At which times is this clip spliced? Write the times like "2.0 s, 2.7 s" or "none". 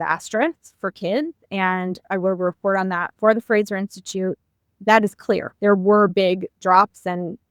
2.0 s, 4.6 s, 6.5 s